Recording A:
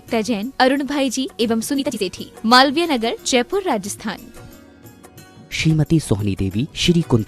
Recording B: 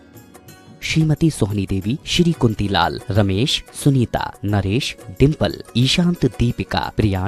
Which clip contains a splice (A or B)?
A